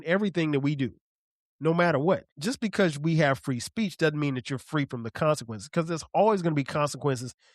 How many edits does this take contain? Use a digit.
1